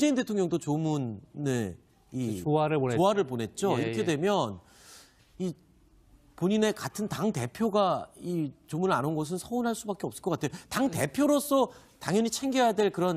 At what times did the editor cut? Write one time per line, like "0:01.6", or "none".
0:05.1